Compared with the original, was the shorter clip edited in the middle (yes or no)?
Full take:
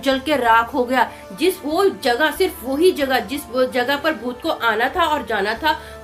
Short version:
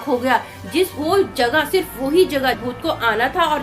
yes